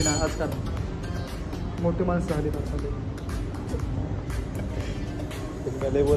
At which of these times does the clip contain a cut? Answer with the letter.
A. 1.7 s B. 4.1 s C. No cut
C